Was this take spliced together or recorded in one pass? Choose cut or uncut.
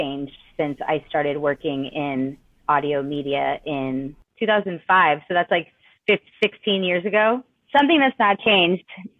cut